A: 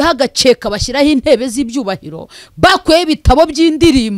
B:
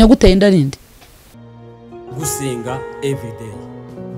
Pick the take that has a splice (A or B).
B